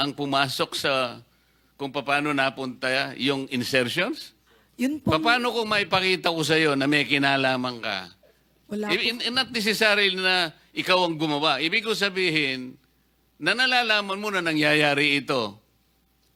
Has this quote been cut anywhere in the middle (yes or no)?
no